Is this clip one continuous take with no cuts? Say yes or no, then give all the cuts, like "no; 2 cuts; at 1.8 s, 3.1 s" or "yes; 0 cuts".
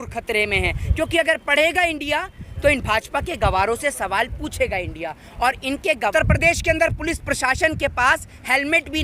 no; 1 cut; at 6.1 s